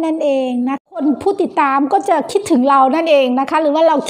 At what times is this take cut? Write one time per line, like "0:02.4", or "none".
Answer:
0:01.0